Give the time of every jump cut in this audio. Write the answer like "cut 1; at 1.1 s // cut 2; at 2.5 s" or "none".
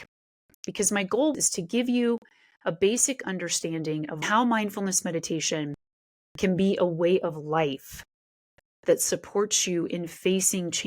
cut 1; at 1.3 s // cut 2; at 4.2 s